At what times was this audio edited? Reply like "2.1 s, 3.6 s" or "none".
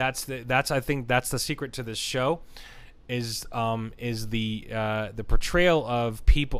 none